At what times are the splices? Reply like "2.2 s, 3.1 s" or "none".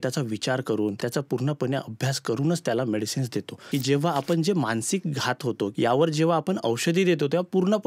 1.0 s, 3.6 s, 5.7 s